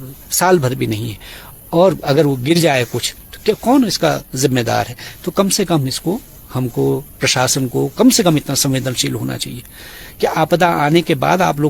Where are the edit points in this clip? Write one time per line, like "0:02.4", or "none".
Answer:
none